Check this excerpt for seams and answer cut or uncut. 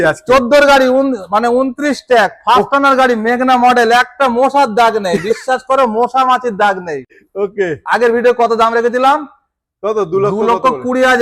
uncut